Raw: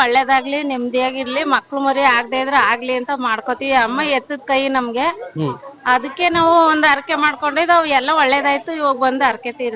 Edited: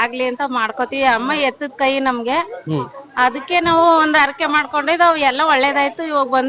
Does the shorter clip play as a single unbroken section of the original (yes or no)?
yes